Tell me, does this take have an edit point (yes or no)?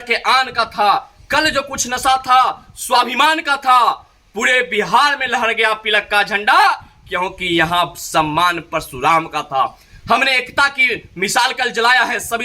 no